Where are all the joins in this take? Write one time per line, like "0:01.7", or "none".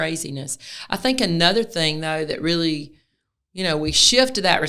none